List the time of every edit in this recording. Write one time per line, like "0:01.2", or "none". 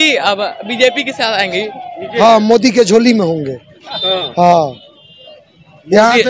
0:02.1